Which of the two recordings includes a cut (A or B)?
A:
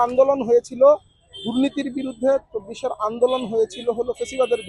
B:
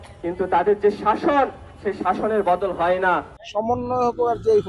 B